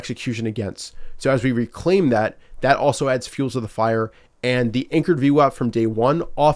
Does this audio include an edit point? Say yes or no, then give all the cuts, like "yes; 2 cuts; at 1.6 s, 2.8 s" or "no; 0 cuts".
no; 0 cuts